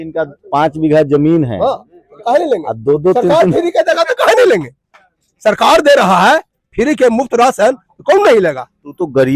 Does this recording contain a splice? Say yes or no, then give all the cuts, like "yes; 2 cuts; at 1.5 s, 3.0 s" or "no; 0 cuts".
no; 0 cuts